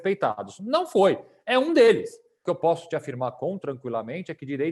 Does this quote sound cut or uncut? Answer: cut